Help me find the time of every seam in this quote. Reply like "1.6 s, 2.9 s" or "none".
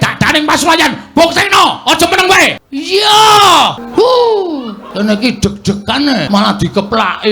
2.7 s, 3.8 s, 4.8 s, 6.3 s